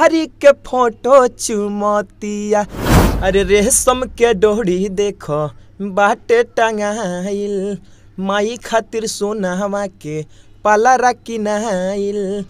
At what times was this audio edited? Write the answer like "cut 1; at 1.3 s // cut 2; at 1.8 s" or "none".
cut 1; at 2.9 s